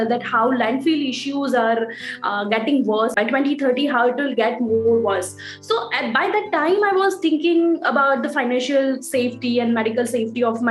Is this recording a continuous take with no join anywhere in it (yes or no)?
no